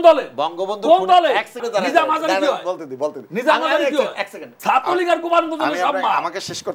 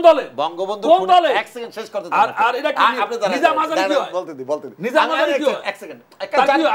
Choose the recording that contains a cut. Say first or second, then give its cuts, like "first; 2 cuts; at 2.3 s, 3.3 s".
first; 2 cuts; at 1.6 s, 4.5 s